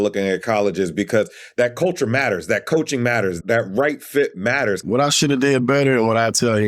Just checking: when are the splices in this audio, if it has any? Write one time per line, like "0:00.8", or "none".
0:04.8